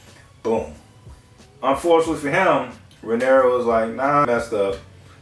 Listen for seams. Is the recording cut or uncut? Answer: cut